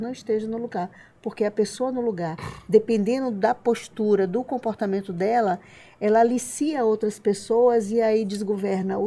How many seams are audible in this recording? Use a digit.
0